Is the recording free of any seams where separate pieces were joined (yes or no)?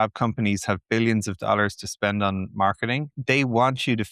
no